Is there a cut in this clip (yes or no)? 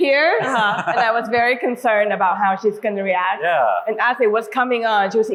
no